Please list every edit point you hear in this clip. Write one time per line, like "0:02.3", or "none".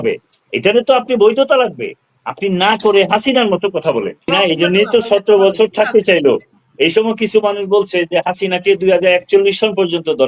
0:04.3

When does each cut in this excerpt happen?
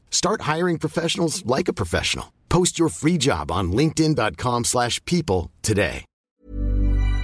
0:06.3

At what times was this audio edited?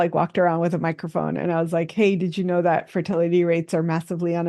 none

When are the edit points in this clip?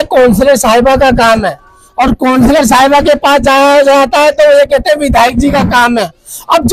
none

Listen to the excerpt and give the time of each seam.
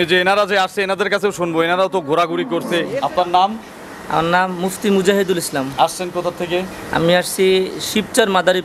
0:02.9

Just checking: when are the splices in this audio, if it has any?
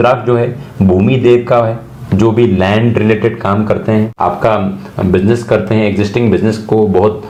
none

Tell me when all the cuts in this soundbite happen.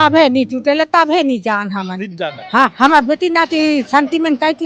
none

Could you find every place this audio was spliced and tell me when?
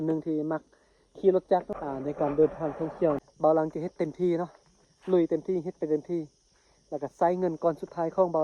0:01.8
0:03.3

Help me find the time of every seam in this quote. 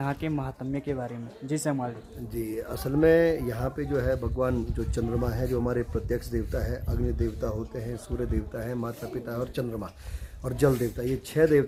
none

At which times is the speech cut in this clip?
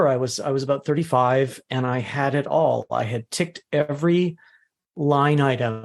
none

